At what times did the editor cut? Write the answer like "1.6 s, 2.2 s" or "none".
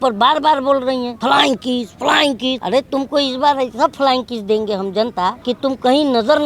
1.1 s, 2.6 s, 5.4 s